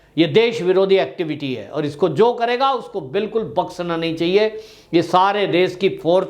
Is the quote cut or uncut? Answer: uncut